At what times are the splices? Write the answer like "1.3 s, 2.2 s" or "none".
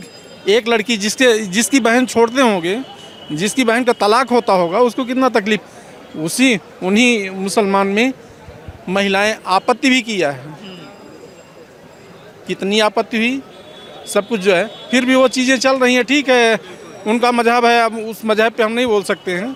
none